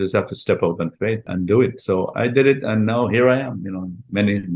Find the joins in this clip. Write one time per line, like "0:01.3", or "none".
0:01.3